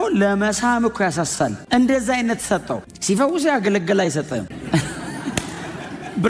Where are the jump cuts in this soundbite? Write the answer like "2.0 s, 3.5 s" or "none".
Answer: none